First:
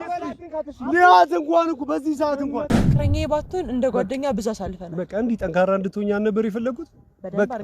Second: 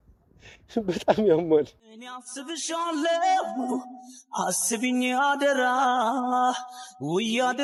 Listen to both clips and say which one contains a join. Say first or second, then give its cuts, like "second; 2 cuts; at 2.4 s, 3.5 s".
first; 1 cut; at 2.7 s